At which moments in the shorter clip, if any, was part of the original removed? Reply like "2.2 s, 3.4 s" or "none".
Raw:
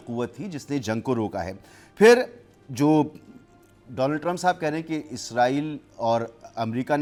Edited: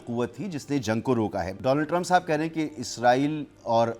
1.5 s